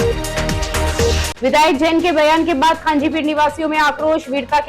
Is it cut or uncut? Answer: cut